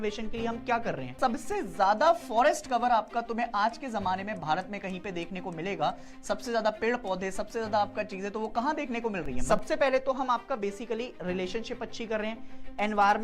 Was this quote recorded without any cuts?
no; 2 cuts; at 1.1 s, 9.4 s

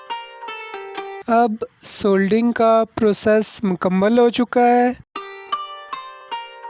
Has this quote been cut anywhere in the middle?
no; 0 cuts

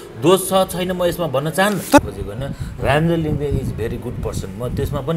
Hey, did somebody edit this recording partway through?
yes; 1 cut; at 2.0 s

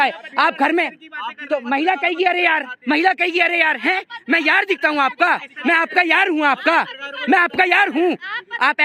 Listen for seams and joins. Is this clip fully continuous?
yes; 0 cuts

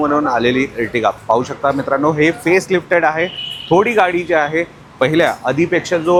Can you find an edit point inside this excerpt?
no; 0 cuts

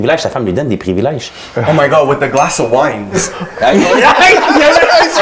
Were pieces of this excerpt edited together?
no; 0 cuts

